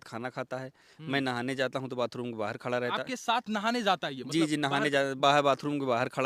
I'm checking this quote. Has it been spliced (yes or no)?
no